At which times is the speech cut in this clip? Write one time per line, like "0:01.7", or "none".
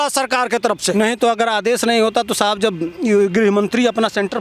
0:00.9